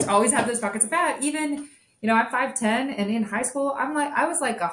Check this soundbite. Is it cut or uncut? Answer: uncut